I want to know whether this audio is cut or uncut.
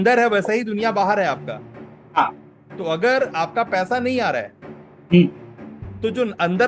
uncut